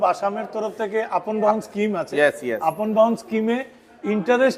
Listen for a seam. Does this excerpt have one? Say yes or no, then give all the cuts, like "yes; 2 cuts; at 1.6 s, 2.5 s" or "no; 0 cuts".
no; 0 cuts